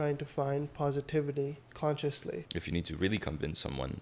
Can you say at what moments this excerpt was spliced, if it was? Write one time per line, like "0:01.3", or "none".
0:01.6
0:02.5